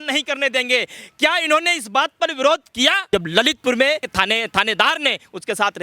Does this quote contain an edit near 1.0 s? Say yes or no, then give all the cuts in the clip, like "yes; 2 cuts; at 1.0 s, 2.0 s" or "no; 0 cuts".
no; 2 cuts; at 3.0 s, 4.1 s